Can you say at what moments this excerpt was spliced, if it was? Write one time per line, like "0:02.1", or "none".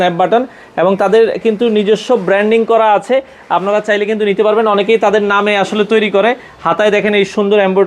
none